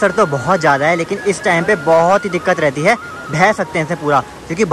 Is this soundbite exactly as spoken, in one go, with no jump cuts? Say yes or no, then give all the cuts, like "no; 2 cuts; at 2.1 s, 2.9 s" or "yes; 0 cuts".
yes; 0 cuts